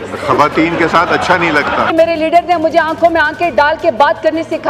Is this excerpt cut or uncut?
cut